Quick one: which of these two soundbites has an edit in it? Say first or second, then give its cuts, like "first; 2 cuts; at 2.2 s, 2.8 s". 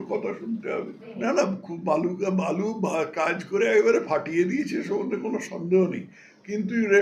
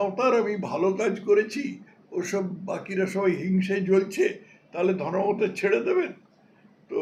first; 1 cut; at 1.1 s